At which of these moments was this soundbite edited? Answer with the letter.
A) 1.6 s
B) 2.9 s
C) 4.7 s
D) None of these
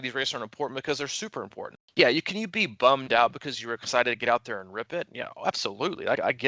A